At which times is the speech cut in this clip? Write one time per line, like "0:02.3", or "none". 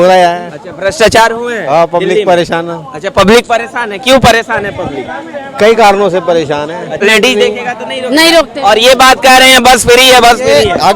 0:07.0